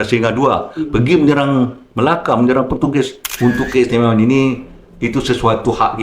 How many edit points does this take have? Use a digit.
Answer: 1